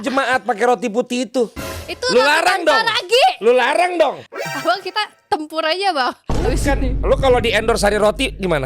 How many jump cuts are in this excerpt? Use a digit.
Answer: 1